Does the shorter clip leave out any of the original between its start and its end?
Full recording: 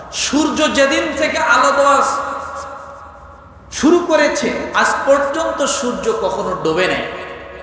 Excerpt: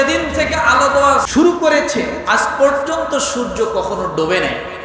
yes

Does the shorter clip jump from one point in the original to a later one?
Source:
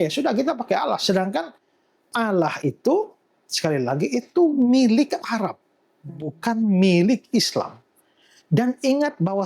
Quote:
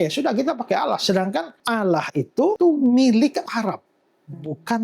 yes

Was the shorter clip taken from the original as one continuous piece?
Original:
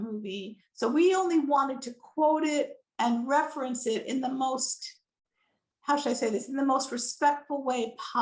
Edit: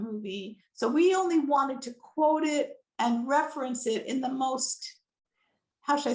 yes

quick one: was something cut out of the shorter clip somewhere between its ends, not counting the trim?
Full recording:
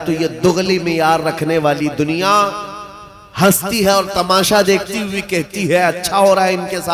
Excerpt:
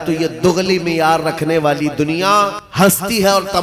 yes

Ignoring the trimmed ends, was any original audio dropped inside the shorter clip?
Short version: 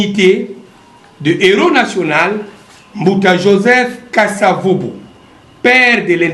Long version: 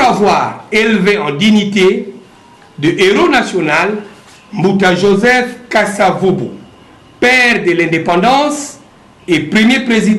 no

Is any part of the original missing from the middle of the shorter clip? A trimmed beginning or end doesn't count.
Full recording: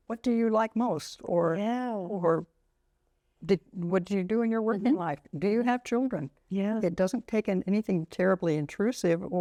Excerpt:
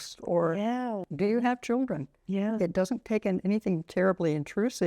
yes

